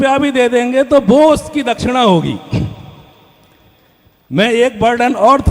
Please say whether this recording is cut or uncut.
uncut